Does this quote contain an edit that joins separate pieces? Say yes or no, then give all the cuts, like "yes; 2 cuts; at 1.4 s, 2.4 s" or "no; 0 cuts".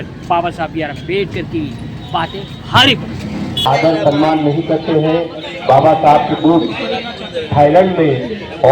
yes; 1 cut; at 3.5 s